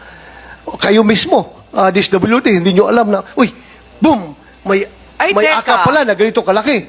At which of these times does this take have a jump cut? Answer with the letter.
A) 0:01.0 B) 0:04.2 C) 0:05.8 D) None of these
D